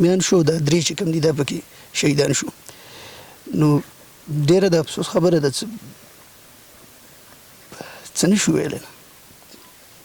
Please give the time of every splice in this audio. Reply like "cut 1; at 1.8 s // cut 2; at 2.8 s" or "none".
none

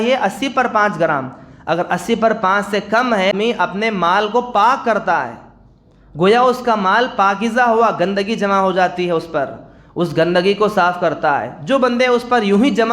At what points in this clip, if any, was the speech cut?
cut 1; at 3.3 s

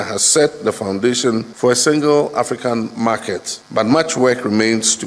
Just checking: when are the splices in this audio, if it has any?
cut 1; at 1.5 s // cut 2; at 3.5 s

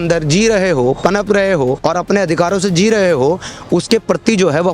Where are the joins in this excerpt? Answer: cut 1; at 1.8 s

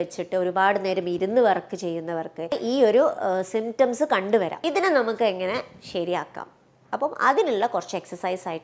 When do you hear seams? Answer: cut 1; at 2.6 s // cut 2; at 4.6 s

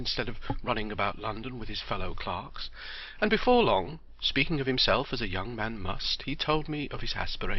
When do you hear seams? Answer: cut 1; at 6.5 s

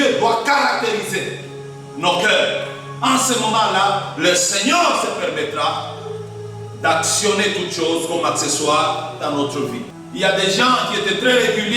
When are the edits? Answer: cut 1; at 10.0 s

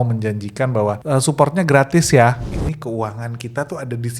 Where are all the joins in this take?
cut 1; at 1.0 s // cut 2; at 2.5 s

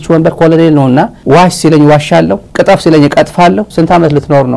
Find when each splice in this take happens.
cut 1; at 3.7 s

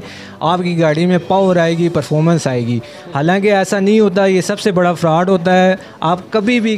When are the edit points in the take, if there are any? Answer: none

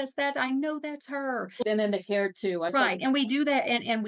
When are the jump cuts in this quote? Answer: none

